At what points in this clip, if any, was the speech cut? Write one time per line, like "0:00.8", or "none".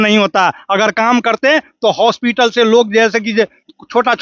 none